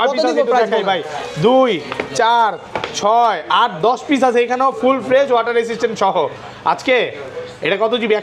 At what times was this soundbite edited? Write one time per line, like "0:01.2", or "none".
none